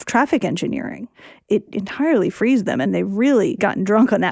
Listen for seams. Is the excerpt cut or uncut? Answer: cut